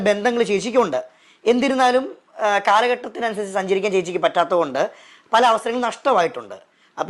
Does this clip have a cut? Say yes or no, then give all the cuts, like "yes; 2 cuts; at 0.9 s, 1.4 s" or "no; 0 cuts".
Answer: no; 0 cuts